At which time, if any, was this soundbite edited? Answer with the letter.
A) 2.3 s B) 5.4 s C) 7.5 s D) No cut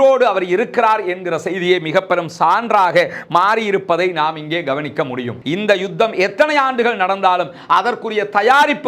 B